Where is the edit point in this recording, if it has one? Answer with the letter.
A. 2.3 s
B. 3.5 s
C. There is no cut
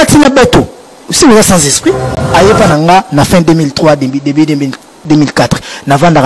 A